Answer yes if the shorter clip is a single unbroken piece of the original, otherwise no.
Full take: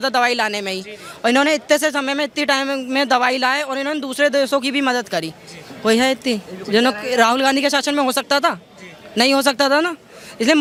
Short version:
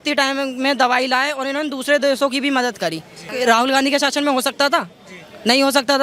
no